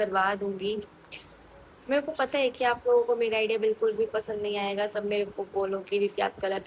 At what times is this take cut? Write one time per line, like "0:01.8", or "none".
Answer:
none

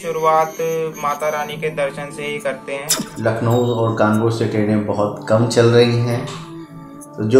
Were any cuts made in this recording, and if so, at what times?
0:03.0

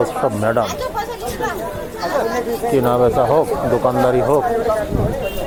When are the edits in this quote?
none

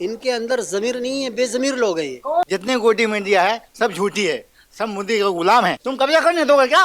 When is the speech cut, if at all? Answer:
0:02.5
0:05.8

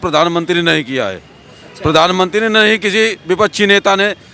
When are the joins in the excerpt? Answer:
none

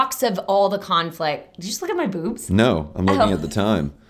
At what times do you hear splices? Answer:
none

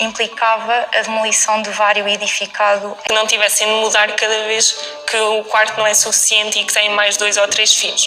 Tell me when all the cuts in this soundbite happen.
0:02.9

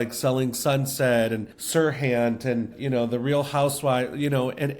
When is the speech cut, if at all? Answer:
0:01.5
0:02.8

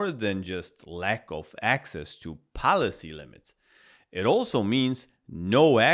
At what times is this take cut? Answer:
none

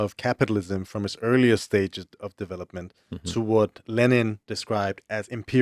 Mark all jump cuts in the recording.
0:04.5

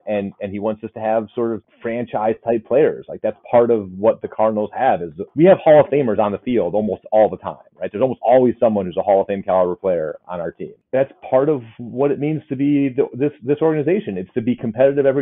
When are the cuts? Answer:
0:01.7
0:05.2
0:10.8

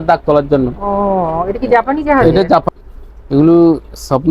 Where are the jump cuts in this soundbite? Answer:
0:02.6

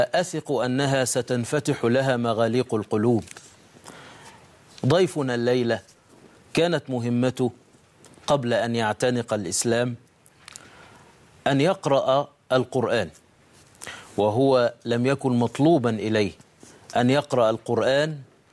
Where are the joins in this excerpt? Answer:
0:04.8

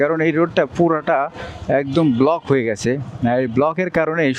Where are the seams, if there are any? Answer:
none

